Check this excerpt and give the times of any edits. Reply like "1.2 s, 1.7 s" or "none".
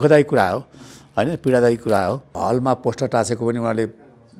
2.3 s